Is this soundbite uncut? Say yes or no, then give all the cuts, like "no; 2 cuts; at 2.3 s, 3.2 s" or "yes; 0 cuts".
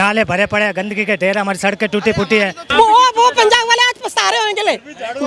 no; 1 cut; at 2.6 s